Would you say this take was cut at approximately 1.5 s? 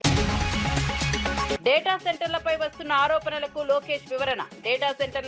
yes; 1 cut; at 1.5 s

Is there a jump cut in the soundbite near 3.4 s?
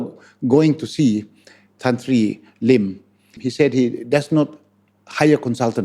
yes; 1 cut; at 3.4 s

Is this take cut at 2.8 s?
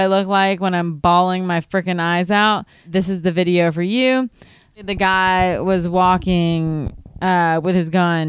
yes; 2 cuts; at 2.8 s, 4.8 s

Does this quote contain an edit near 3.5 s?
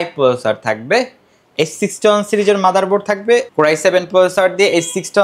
yes; 1 cut; at 3.5 s

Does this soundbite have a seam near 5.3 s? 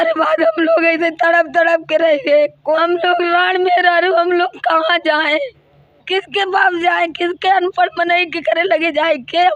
no; 1 cut; at 2.8 s

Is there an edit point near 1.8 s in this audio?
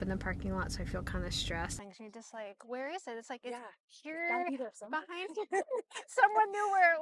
yes; 1 cut; at 1.8 s

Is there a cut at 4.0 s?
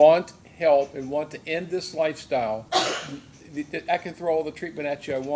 no; 1 cut; at 2.6 s

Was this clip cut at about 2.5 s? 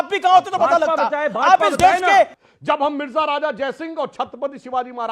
yes; 1 cut; at 2.5 s

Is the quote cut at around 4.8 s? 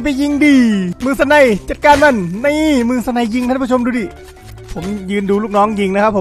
no; 1 cut; at 0.9 s

